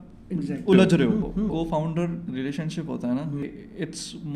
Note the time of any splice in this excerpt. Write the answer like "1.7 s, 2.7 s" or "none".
1.5 s, 3.4 s